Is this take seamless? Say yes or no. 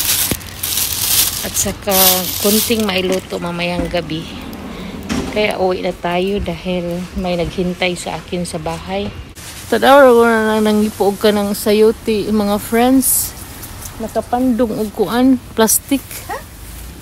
no